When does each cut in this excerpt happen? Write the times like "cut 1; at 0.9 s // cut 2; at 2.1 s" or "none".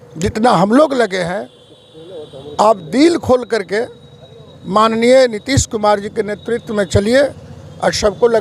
none